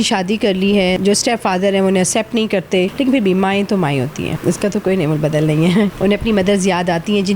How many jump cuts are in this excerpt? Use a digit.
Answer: 4